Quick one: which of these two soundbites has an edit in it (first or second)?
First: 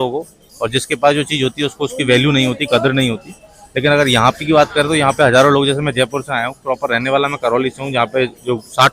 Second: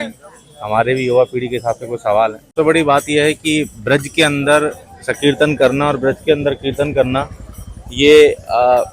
second